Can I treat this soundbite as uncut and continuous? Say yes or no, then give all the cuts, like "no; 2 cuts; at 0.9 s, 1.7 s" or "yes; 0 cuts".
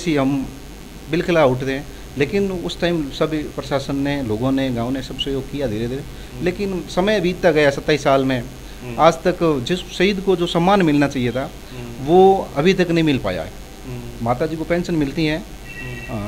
yes; 0 cuts